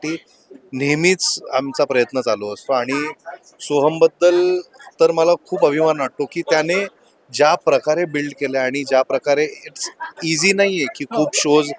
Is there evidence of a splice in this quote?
no; 0 cuts

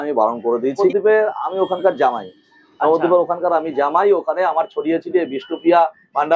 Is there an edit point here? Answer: yes; 1 cut; at 0.9 s

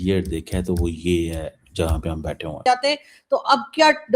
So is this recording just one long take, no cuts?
no; 1 cut; at 2.6 s

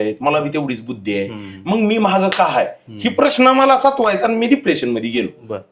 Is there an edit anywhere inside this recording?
no; 0 cuts

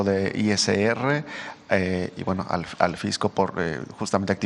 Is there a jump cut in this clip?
no; 0 cuts

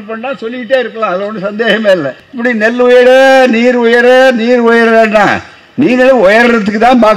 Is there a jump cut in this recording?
yes; 1 cut; at 2.2 s

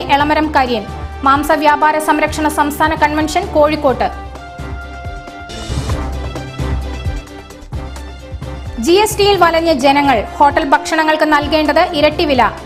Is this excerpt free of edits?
yes; 0 cuts

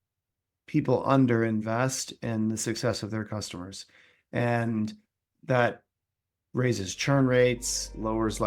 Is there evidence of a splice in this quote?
yes; 1 cut; at 5.2 s

